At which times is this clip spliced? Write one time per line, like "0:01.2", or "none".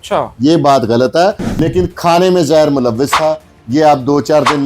0:01.5